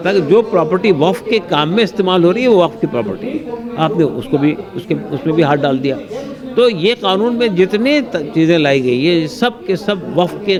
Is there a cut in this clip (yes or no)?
no